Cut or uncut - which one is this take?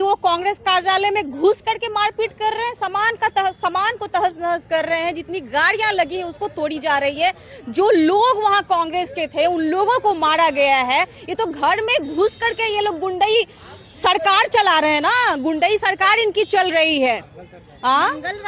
uncut